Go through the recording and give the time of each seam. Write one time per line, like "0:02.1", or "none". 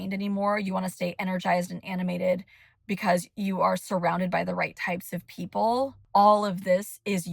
0:06.0